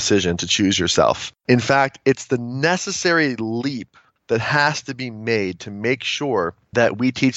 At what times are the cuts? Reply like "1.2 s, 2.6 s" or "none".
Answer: none